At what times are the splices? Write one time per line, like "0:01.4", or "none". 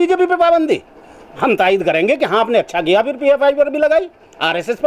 none